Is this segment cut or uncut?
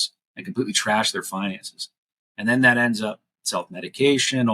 uncut